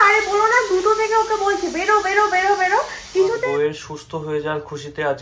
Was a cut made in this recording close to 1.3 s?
no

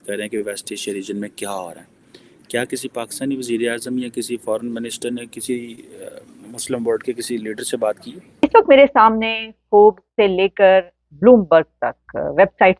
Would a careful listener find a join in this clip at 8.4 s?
yes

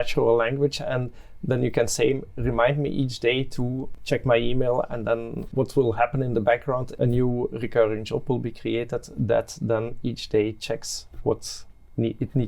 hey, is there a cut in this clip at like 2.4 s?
no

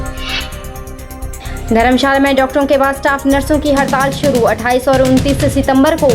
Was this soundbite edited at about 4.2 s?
no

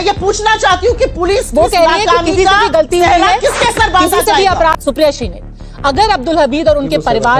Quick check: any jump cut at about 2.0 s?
no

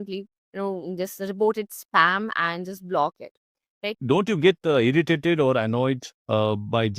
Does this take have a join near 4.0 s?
yes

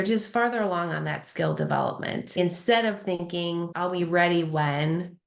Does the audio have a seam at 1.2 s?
no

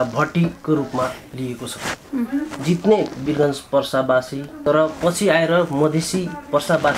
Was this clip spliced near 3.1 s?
no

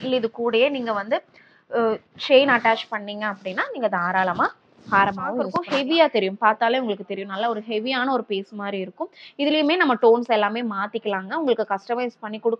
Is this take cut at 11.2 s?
no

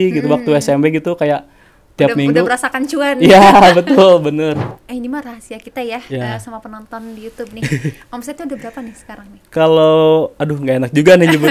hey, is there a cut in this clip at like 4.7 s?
yes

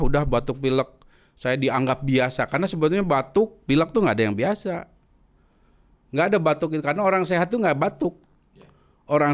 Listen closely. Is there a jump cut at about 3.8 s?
no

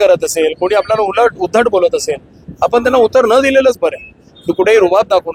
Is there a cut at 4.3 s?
yes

